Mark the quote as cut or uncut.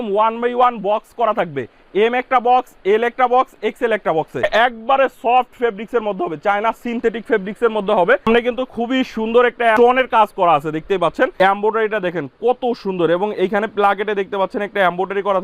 cut